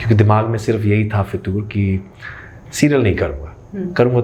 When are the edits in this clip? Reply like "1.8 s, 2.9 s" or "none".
none